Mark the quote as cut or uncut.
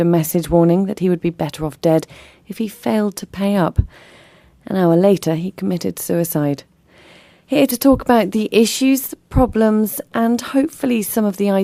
uncut